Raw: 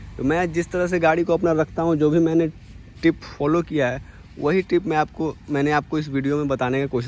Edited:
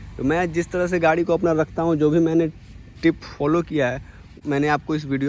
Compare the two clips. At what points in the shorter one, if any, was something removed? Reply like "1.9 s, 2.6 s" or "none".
4.3 s